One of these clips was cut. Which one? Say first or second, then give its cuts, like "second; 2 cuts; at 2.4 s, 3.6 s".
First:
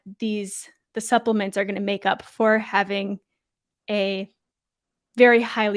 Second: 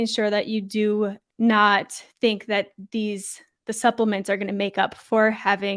second; 1 cut; at 1.2 s